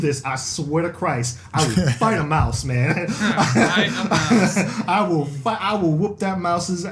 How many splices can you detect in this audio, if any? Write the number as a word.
zero